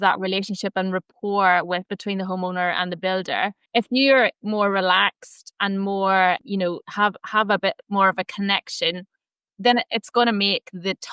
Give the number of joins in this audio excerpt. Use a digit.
2